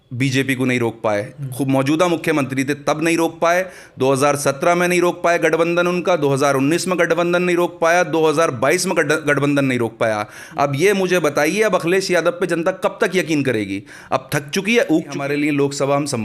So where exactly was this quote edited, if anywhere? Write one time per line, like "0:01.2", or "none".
0:15.2